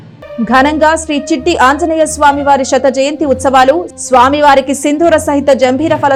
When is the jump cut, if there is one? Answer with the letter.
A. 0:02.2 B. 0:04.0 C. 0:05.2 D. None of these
D